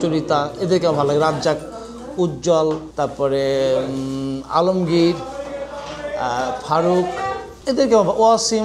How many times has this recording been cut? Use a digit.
2